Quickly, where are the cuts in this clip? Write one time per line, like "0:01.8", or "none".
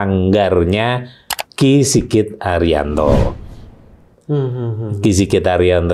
none